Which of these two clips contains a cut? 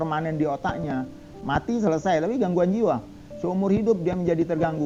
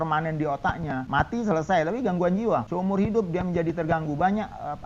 second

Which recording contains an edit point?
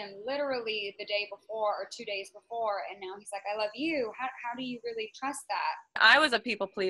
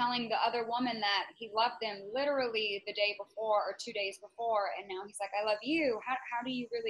first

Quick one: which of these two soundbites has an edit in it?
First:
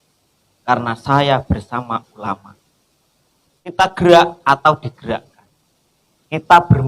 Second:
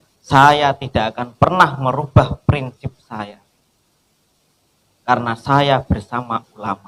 first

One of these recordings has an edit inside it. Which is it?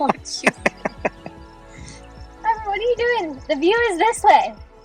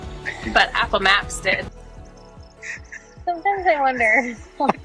second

